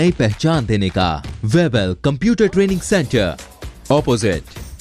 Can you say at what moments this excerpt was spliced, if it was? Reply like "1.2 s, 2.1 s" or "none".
1.3 s